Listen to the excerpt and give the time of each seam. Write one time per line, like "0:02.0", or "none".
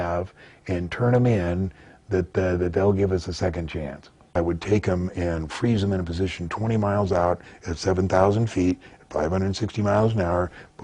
0:04.1